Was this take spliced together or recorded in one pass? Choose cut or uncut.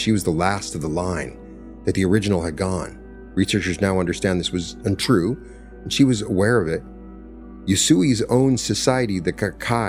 uncut